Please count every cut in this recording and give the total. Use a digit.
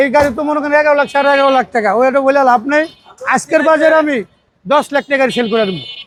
0